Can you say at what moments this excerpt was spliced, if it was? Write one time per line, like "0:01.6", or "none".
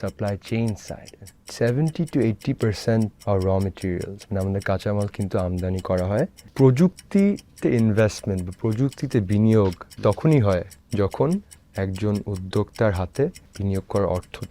0:01.2
0:03.2
0:06.4
0:10.8
0:13.5